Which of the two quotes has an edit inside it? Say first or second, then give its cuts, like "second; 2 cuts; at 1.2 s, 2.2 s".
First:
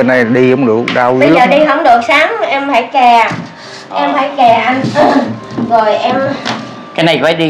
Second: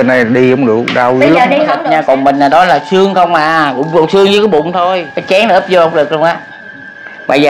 second; 2 cuts; at 1.8 s, 5.1 s